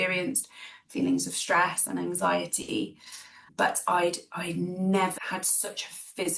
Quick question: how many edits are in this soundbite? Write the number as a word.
one